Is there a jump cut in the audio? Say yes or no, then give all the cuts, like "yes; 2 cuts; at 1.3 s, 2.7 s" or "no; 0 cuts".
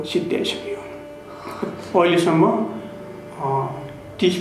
no; 0 cuts